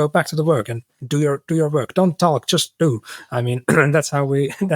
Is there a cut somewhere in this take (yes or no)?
no